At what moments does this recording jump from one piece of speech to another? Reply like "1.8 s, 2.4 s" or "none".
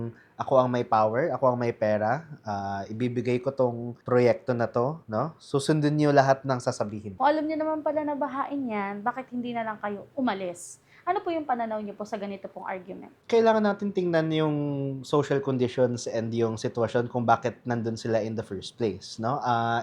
7.0 s